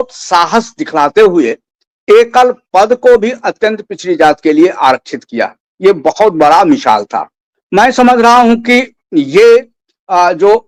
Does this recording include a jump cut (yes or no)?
no